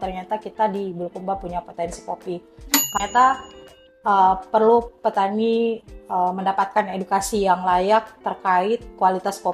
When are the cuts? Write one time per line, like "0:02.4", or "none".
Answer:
0:02.9